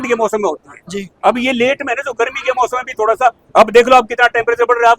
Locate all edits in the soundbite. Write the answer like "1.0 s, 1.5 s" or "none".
none